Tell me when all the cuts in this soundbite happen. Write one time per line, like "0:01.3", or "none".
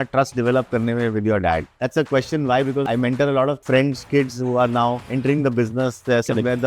0:01.8
0:02.8
0:03.6
0:05.1